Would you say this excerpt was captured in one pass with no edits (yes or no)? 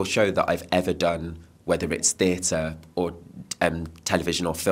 yes